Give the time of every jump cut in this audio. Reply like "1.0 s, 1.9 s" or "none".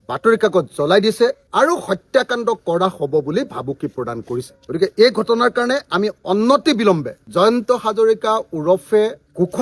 1.4 s, 4.5 s